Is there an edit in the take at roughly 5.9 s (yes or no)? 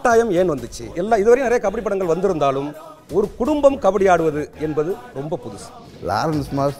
yes